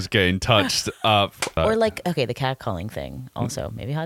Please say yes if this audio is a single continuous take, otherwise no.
no